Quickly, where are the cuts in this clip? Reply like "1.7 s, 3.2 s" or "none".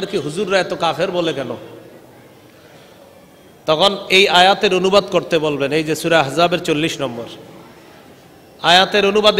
none